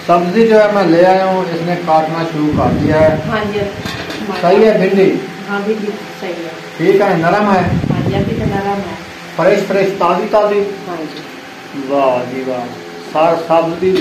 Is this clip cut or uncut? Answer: uncut